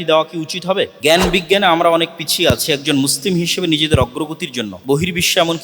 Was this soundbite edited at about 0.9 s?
yes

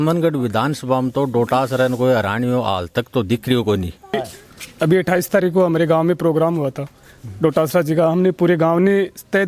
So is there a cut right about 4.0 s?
yes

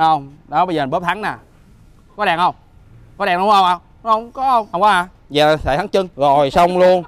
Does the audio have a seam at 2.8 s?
no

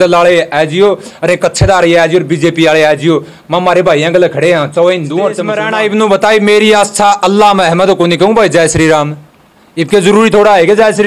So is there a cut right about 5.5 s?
yes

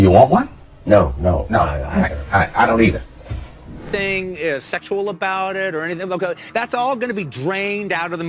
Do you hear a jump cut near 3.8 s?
yes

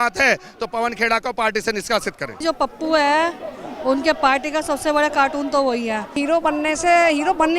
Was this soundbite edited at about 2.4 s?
yes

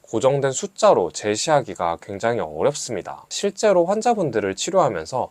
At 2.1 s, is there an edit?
no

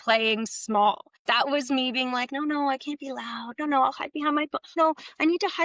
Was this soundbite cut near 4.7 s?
yes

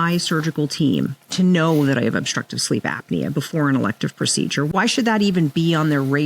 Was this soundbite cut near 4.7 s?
yes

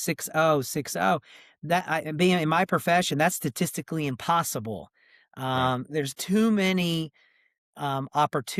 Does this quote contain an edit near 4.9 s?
no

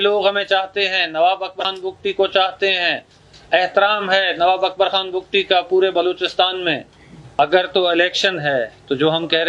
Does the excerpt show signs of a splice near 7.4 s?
yes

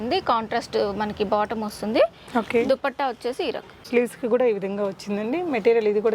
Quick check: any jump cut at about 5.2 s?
no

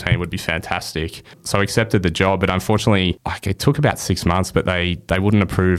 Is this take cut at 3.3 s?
yes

